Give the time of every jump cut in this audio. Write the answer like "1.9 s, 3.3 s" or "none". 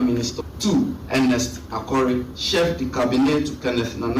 0.8 s, 2.4 s